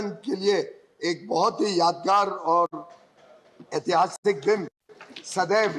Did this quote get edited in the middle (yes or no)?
no